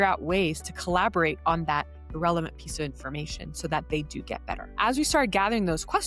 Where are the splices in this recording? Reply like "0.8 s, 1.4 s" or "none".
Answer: 4.7 s